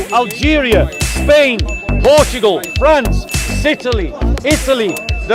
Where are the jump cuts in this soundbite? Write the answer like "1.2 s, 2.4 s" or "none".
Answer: none